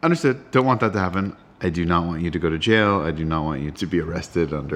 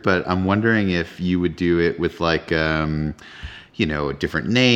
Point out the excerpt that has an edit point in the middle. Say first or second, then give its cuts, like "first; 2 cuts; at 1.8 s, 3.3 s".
first; 1 cut; at 1.4 s